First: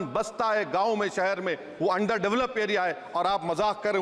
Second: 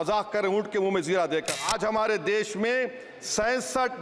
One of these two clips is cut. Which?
second; 1 cut; at 1.6 s

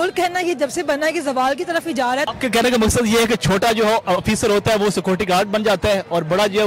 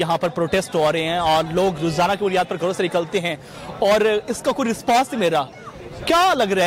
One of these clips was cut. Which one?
first; 1 cut; at 2.3 s

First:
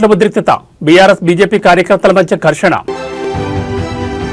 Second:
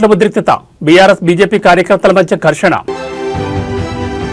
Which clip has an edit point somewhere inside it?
first; 1 cut; at 3.2 s

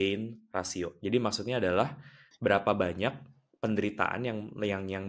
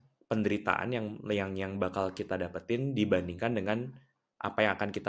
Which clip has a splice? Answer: first; 1 cut; at 1.0 s

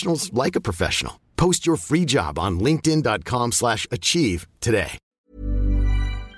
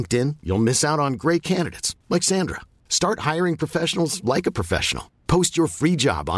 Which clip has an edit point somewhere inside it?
first; 1 cut; at 5.1 s

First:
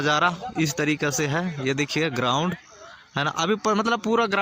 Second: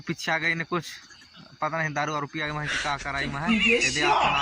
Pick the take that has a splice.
second; 1 cut; at 3.5 s

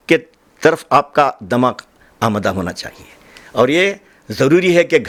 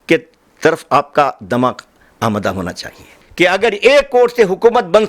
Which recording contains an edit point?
second; 1 cut; at 3.2 s

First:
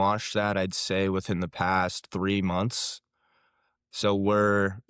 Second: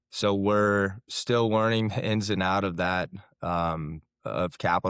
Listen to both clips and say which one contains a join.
second; 1 cut; at 3.2 s

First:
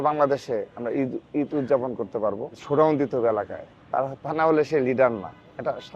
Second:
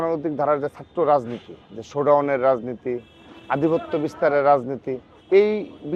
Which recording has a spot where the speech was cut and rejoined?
first; 1 cut; at 2.6 s

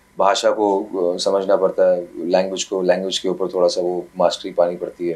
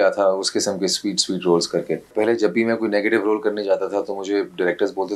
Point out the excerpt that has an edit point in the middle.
second; 1 cut; at 2.1 s

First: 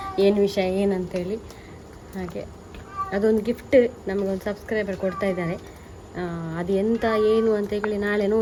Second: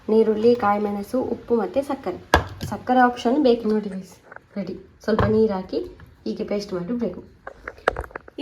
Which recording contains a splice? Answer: second; 1 cut; at 3.6 s

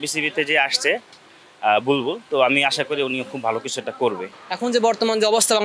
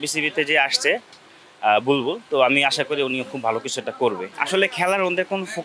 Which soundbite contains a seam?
first; 1 cut; at 4.3 s

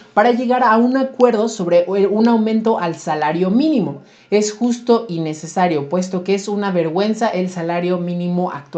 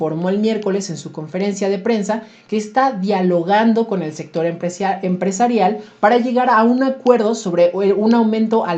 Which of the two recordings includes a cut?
first; 1 cut; at 4.1 s

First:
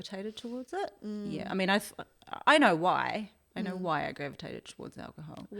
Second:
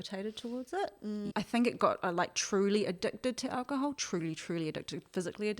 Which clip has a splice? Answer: second; 1 cut; at 1.3 s

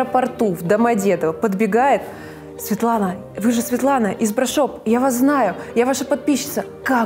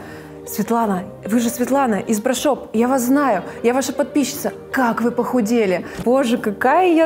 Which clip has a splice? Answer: second; 1 cut; at 6.0 s

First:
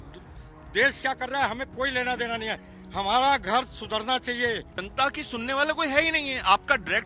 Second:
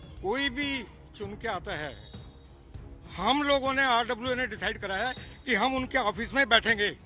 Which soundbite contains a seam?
first; 1 cut; at 4.8 s

